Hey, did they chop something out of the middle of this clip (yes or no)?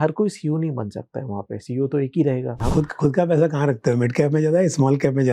yes